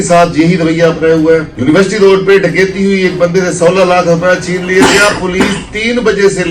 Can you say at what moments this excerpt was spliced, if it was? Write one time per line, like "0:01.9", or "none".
0:01.5